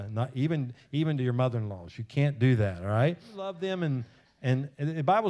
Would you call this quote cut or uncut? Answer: cut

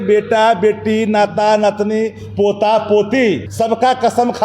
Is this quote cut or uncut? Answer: cut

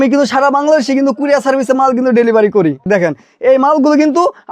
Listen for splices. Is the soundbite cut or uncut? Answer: cut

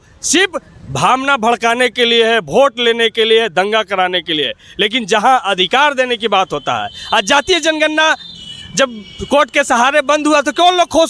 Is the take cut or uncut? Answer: uncut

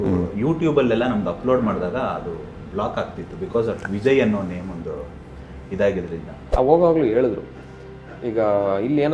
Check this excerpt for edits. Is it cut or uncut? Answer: cut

